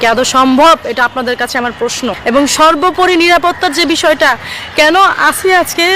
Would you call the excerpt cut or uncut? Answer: cut